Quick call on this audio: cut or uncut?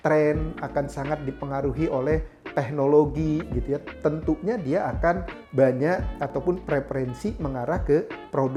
uncut